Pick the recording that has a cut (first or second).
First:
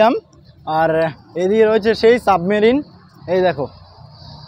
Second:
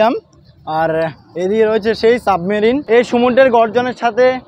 second